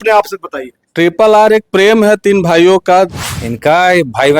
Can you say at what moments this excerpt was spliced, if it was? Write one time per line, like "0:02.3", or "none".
0:03.1